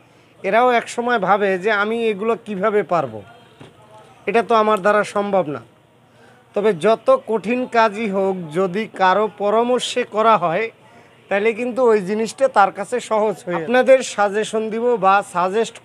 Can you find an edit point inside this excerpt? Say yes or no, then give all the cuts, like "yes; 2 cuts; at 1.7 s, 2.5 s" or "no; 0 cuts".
yes; 1 cut; at 13.6 s